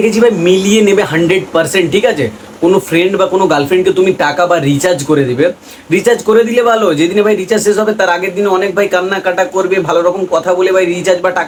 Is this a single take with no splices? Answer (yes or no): yes